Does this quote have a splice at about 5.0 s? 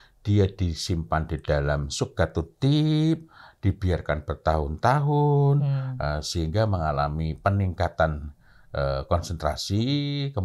no; 0 cuts

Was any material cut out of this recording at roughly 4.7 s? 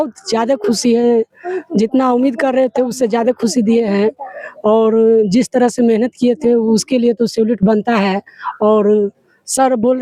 no; 0 cuts

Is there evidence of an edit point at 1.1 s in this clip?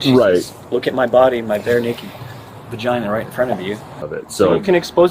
no; 1 cut; at 4.0 s

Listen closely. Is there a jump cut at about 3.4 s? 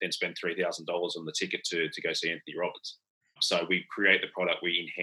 yes; 1 cut; at 3.4 s

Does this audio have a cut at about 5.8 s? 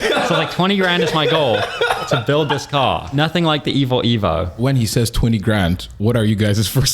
no; 2 cuts; at 3.1 s, 4.5 s

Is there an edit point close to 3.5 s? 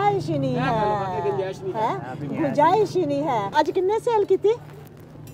yes; 1 cut; at 3.5 s

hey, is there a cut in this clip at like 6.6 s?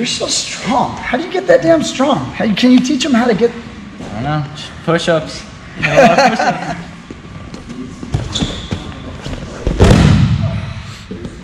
yes; 1 cut; at 6.6 s

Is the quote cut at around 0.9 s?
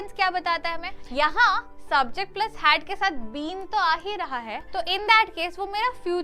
yes; 2 cuts; at 0.9 s, 4.6 s

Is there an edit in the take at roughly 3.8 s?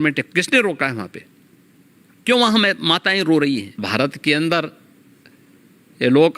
yes; 1 cut; at 3.8 s

